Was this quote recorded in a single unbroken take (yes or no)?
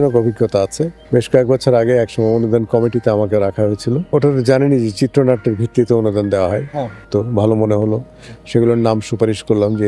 no